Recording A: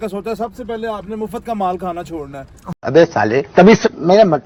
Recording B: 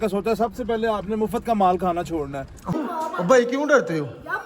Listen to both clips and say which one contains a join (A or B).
B